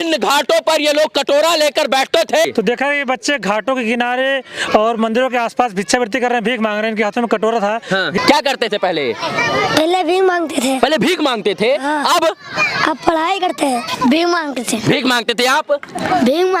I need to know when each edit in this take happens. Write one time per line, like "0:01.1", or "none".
0:02.5
0:08.2
0:13.9